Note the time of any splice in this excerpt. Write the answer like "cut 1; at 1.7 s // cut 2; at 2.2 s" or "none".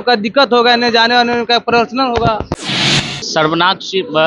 cut 1; at 2.9 s